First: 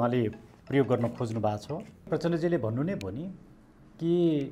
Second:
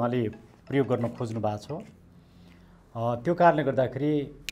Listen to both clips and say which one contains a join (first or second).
first